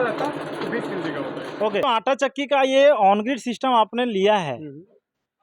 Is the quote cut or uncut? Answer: cut